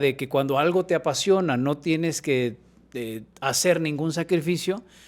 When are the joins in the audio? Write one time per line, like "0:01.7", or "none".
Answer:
none